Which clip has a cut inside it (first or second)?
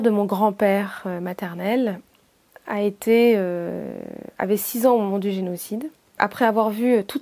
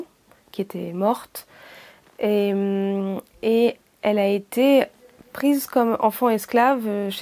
first